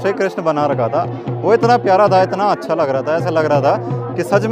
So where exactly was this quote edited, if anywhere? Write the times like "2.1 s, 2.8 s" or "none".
none